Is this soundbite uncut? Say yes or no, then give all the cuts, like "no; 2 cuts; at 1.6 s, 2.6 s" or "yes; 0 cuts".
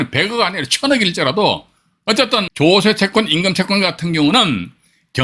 no; 1 cut; at 2.1 s